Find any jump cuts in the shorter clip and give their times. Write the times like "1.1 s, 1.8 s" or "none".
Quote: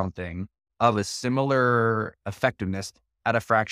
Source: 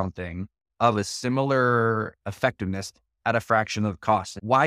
none